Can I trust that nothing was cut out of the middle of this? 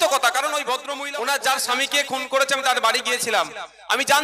no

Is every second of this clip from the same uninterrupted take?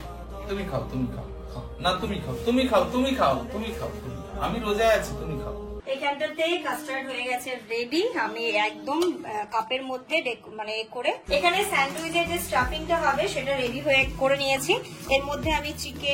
no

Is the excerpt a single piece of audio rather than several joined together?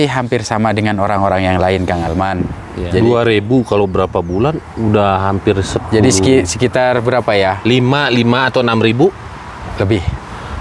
no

